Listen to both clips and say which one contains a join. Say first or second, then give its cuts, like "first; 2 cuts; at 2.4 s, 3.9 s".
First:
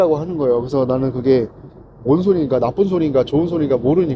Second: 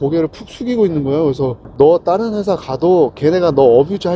second; 1 cut; at 1.6 s